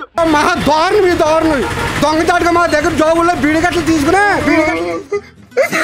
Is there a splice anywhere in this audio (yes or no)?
no